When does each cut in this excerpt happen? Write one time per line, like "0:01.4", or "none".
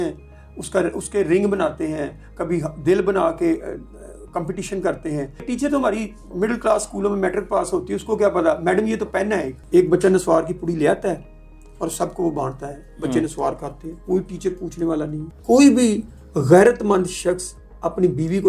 0:05.4
0:09.5
0:15.2